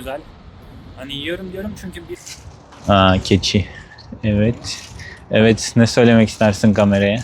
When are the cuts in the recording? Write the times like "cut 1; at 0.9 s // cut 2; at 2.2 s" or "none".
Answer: cut 1; at 2.0 s

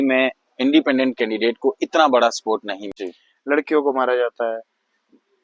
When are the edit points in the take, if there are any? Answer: cut 1; at 2.9 s

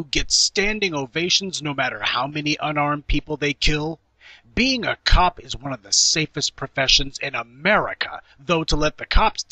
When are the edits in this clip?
cut 1; at 3.0 s

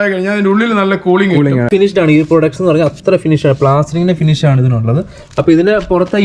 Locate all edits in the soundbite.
cut 1; at 1.7 s

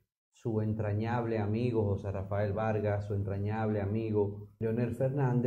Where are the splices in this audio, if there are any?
cut 1; at 4.5 s

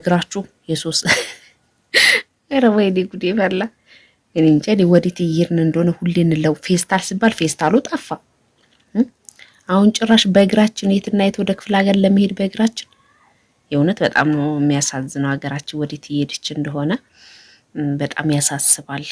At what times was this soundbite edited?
none

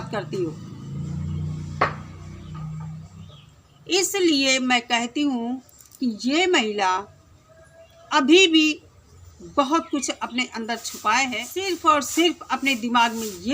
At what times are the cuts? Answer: cut 1; at 11.6 s

